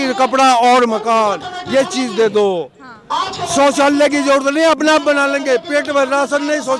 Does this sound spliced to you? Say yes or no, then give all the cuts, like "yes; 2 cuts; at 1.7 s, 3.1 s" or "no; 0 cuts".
no; 0 cuts